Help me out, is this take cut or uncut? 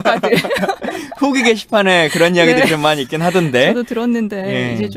uncut